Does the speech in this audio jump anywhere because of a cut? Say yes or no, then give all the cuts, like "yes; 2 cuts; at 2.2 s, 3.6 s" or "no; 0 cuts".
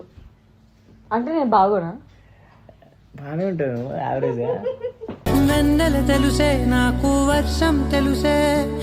no; 0 cuts